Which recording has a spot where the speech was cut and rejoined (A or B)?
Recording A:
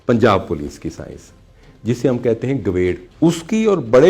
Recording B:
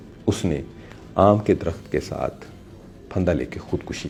A